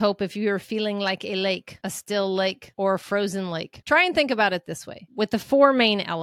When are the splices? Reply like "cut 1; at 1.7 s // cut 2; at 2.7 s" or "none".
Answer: none